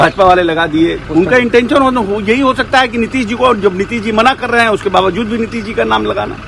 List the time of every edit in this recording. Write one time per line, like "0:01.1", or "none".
0:01.0